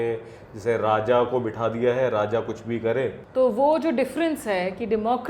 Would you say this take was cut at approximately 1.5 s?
no; 1 cut; at 3.2 s

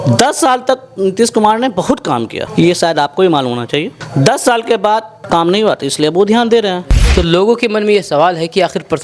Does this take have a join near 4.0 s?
yes; 4 cuts; at 2.4 s, 4.0 s, 5.1 s, 6.9 s

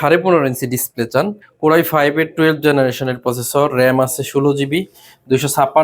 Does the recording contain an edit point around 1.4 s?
yes; 1 cut; at 1.4 s

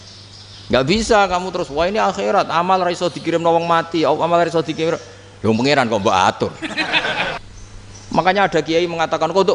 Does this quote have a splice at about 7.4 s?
yes; 1 cut; at 7.4 s

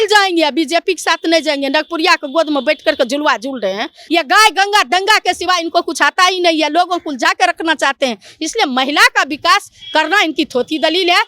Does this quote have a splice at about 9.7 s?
no; 1 cut; at 4.0 s

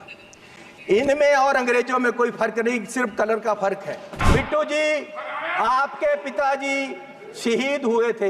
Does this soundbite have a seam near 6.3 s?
no; 1 cut; at 4.1 s

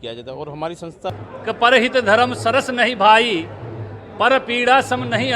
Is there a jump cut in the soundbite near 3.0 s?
no; 1 cut; at 1.2 s

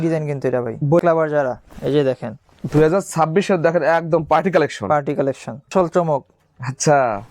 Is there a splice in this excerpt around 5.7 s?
yes; 2 cuts; at 1.0 s, 5.7 s

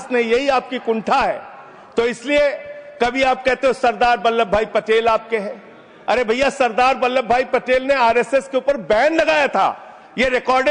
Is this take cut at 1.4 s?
no; 0 cuts

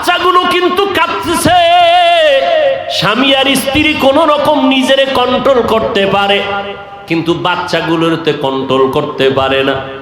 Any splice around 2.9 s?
yes; 1 cut; at 2.9 s

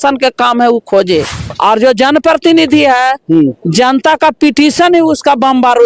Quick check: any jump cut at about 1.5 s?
yes; 1 cut; at 1.5 s

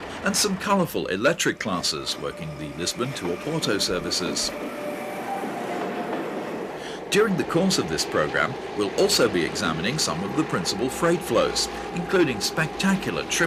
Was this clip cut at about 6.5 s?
yes; 1 cut; at 6.5 s

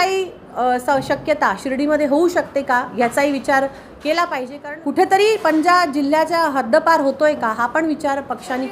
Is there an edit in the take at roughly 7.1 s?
no; 1 cut; at 4.6 s

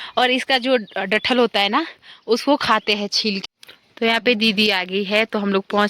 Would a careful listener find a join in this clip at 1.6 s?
no; 1 cut; at 3.4 s

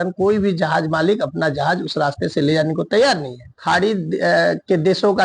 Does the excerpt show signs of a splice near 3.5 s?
yes; 1 cut; at 3.5 s

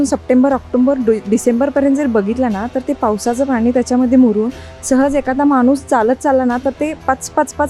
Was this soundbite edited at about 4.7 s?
no; 0 cuts

